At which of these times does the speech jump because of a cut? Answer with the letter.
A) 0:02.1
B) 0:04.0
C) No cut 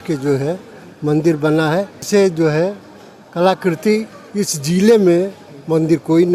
A